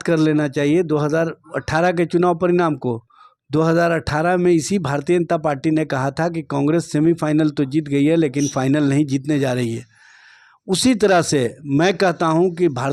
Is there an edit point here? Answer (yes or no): no